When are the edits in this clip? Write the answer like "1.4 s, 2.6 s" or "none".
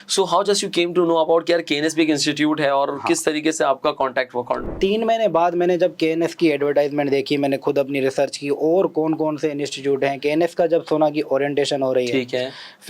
4.7 s